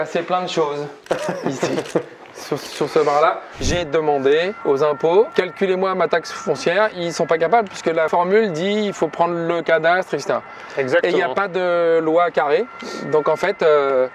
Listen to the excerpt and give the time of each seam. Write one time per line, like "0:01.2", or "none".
0:03.7
0:04.5
0:05.3
0:07.0
0:08.1